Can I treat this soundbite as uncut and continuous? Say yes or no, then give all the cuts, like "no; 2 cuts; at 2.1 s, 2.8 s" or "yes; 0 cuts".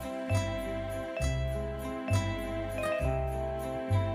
no; 1 cut; at 2.1 s